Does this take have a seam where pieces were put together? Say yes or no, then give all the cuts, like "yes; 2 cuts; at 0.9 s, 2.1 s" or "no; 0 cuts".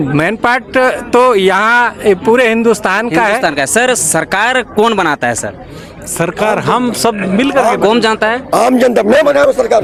no; 0 cuts